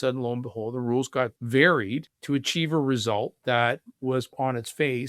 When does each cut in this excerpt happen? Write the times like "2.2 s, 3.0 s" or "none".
1.4 s, 2.1 s, 4.3 s